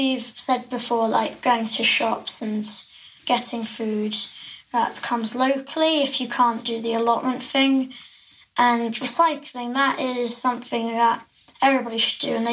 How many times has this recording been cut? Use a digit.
1